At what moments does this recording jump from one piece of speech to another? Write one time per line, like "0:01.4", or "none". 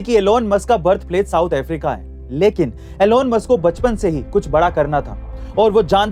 none